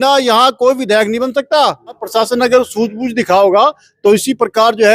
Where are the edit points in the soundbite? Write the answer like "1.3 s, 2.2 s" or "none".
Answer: 2.0 s

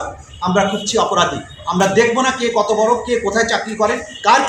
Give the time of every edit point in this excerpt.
none

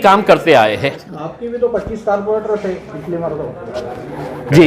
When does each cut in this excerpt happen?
1.1 s

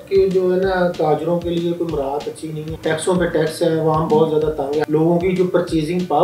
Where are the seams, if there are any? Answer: 2.7 s, 4.9 s

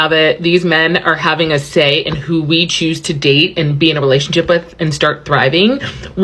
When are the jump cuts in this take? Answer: none

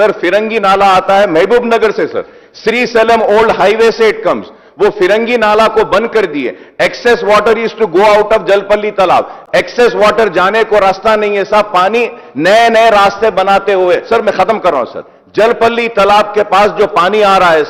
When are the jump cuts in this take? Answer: none

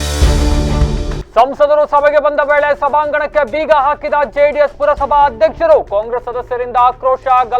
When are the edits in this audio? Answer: 1.0 s

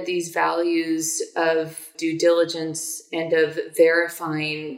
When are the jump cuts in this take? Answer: 1.9 s

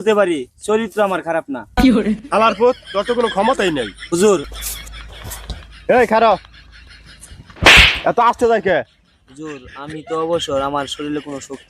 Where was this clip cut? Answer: 4.5 s

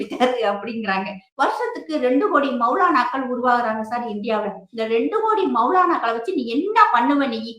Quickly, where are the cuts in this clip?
1.2 s

